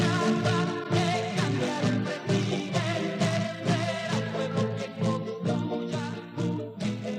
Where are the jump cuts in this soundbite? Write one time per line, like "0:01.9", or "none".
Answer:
0:05.7